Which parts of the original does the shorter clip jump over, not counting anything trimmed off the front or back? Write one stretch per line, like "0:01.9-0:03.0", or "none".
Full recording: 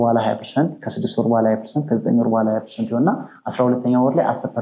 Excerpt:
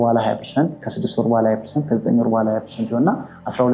none